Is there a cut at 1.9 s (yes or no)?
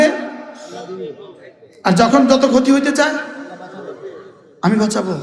no